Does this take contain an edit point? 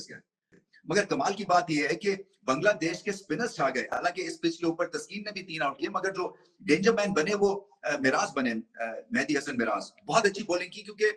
no; 0 cuts

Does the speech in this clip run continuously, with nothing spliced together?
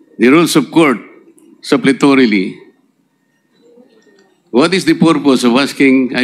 yes; 0 cuts

